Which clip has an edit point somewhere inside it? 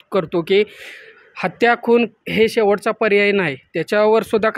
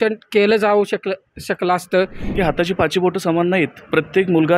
second; 1 cut; at 2.2 s

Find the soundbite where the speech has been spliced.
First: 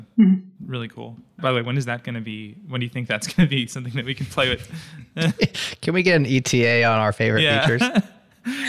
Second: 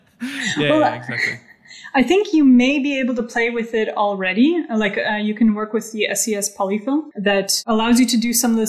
second; 1 cut; at 7.1 s

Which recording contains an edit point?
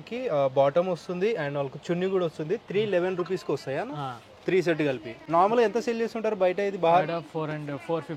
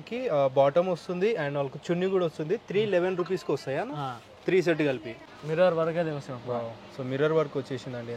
second; 1 cut; at 5.1 s

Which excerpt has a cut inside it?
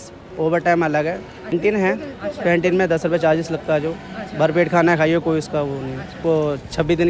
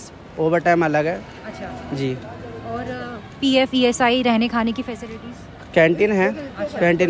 first; 2 cuts; at 1.5 s, 6.2 s

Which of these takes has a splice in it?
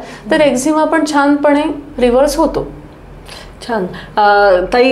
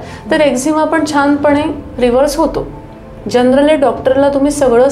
second; 1 cut; at 3.1 s

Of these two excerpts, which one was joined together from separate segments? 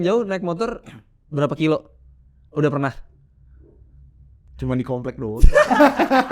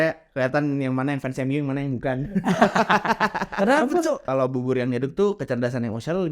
second; 1 cut; at 4.2 s

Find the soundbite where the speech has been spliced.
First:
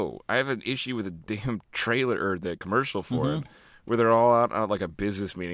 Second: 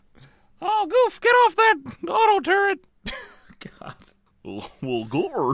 second; 1 cut; at 3.3 s

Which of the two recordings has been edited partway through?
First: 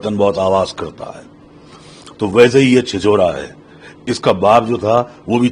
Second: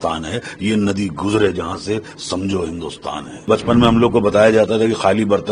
second; 1 cut; at 3.5 s

